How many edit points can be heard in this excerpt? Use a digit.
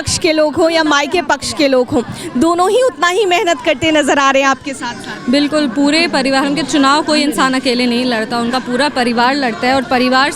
0